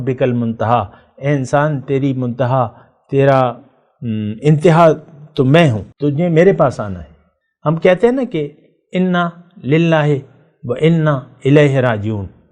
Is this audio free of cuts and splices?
no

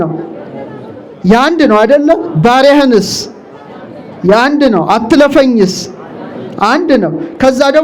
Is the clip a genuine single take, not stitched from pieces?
yes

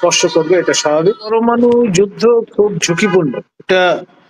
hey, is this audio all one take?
no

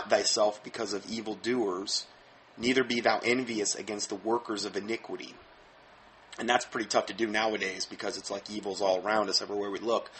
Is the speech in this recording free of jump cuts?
yes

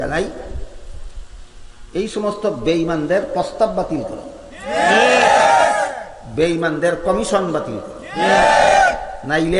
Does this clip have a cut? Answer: no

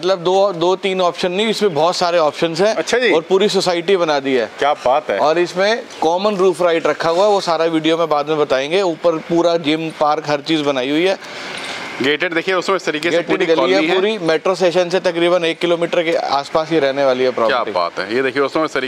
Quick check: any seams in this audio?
no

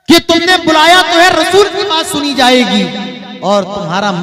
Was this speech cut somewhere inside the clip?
no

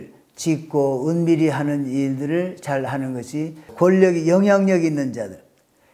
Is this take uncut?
no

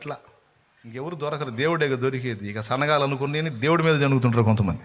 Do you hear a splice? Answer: yes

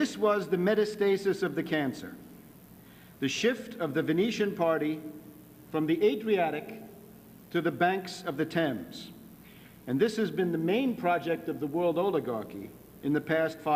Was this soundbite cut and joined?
no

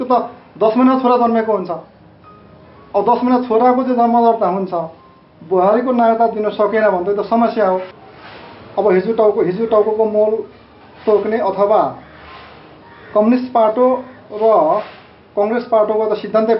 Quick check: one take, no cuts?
no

